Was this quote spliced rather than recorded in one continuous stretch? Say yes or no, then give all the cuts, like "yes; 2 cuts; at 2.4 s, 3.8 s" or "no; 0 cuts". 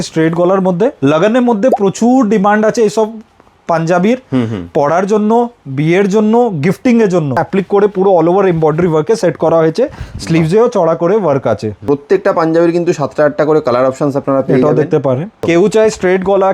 yes; 4 cuts; at 1.0 s, 7.4 s, 11.8 s, 15.4 s